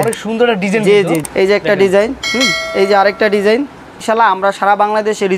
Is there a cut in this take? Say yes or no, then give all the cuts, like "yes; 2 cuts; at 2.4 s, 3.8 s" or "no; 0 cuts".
yes; 3 cuts; at 1.3 s, 2.7 s, 4.0 s